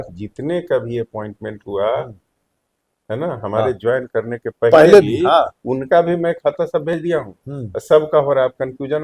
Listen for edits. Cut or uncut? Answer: uncut